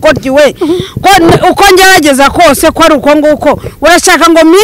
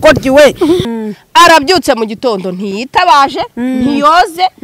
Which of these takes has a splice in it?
second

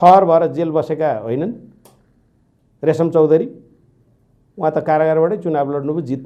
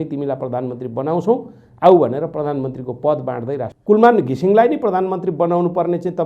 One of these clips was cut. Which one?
second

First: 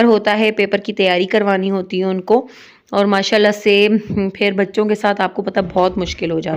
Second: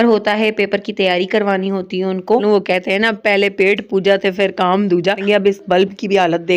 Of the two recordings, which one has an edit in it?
second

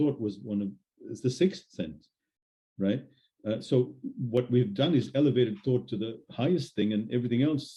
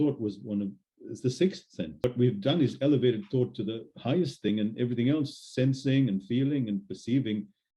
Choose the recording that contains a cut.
second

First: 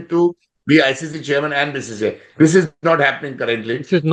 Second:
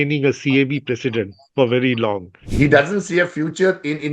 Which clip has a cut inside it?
second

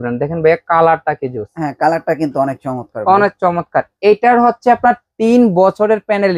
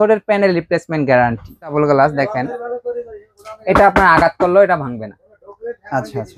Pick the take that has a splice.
second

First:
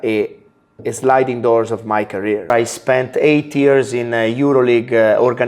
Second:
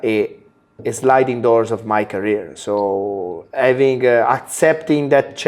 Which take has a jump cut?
first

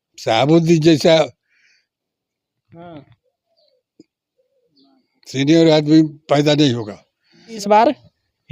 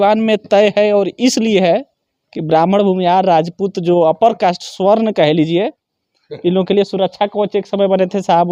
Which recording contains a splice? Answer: first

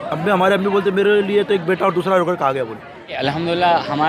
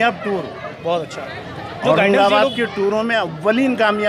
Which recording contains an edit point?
first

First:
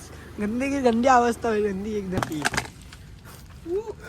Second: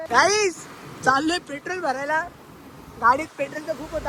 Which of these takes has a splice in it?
first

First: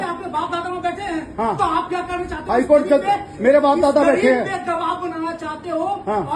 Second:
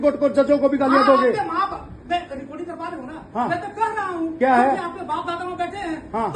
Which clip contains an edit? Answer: second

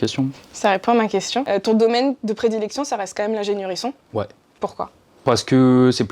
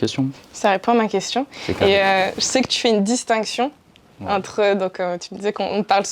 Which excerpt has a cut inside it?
first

